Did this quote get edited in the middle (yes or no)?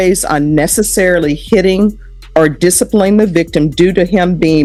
no